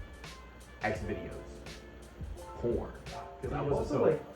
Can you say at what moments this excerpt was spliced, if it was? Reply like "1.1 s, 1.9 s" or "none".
3.3 s

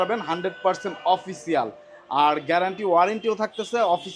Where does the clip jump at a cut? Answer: none

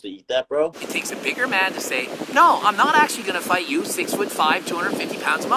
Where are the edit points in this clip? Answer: none

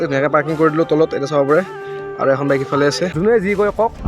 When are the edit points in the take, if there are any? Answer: 3.1 s

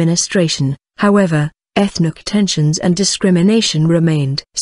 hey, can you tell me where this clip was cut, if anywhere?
2.7 s

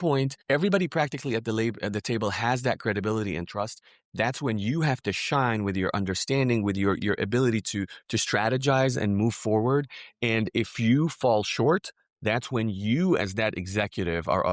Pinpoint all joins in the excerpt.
none

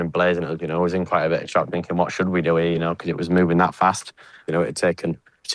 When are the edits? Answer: 4.4 s

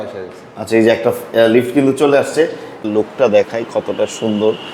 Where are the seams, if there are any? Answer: 2.8 s

